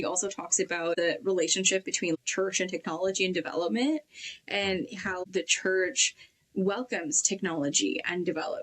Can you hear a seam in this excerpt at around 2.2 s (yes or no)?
yes